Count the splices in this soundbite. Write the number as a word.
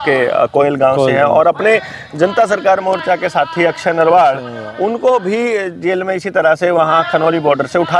zero